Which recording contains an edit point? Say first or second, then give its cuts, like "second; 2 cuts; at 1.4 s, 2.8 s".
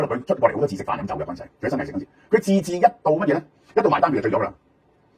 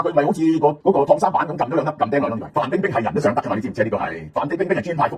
second; 3 cuts; at 0.8 s, 2.4 s, 4.2 s